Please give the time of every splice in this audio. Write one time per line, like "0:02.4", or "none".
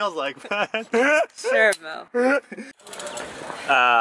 none